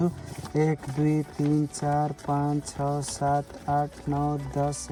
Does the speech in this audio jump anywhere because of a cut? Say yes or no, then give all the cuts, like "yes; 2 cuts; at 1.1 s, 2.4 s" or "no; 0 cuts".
no; 0 cuts